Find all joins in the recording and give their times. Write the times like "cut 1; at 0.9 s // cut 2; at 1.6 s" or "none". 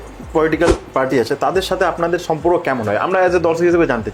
none